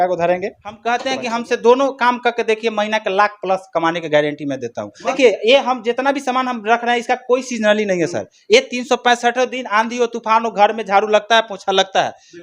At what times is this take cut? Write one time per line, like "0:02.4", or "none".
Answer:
0:00.8
0:05.1